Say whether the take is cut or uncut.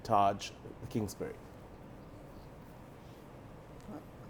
uncut